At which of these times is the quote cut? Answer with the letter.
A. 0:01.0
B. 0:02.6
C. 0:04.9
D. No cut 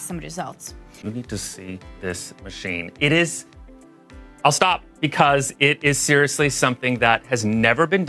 A